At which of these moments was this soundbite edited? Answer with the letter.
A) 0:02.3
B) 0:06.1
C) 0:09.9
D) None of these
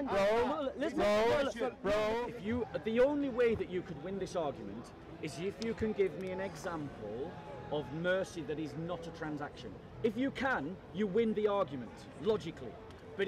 A